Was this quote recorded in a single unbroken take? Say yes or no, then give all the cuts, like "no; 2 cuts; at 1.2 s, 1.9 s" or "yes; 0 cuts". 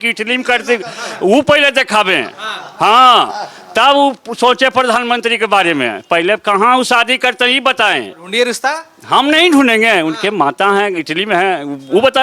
yes; 0 cuts